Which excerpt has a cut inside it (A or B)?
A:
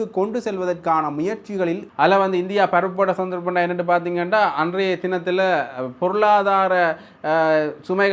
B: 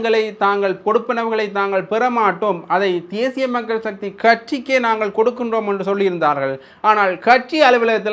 A